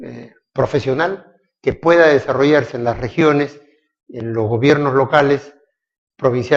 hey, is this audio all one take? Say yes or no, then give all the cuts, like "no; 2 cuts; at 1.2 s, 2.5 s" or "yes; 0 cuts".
yes; 0 cuts